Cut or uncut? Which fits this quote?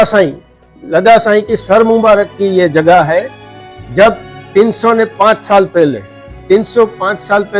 uncut